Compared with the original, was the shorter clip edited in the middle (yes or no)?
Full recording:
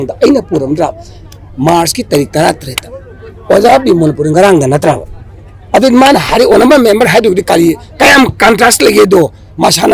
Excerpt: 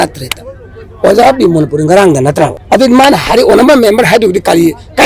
yes